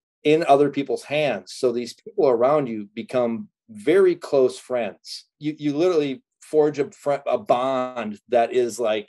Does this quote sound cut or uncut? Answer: cut